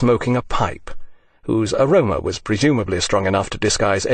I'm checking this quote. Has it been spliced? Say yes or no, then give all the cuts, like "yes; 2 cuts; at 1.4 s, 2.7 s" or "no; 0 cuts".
no; 0 cuts